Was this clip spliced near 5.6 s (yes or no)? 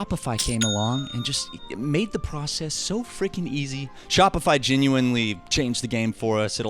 no